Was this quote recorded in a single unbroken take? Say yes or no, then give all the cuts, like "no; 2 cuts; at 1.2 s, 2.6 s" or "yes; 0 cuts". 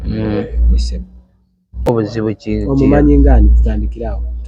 no; 1 cut; at 1.9 s